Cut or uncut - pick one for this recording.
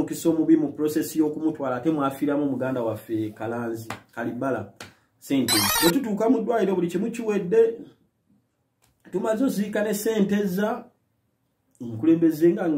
cut